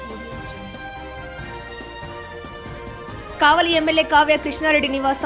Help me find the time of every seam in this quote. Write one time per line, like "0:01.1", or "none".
0:03.0